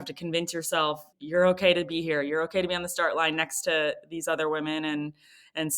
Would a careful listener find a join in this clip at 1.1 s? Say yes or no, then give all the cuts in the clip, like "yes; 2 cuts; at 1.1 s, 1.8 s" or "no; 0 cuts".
yes; 1 cut; at 1.1 s